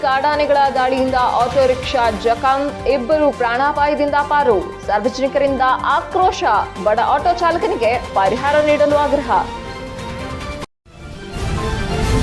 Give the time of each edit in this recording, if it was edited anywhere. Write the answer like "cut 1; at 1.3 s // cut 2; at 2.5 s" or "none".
cut 1; at 10.7 s

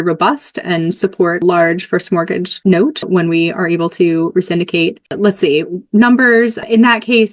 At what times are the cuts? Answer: cut 1; at 2.5 s

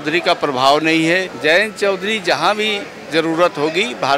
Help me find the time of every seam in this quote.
cut 1; at 1.3 s

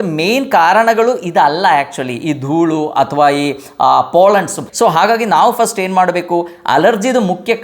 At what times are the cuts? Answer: cut 1; at 4.6 s

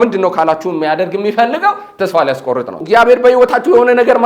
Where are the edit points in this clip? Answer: cut 1; at 2.8 s

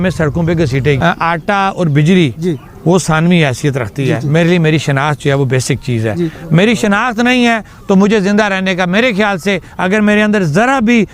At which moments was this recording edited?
cut 1; at 1.0 s

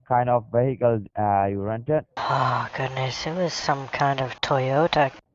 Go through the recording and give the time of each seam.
none

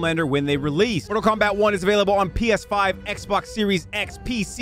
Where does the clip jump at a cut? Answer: cut 1; at 1.0 s

